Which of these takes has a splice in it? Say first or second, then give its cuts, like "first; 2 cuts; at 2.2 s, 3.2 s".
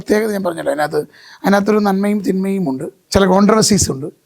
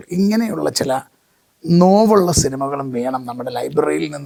first; 1 cut; at 2.9 s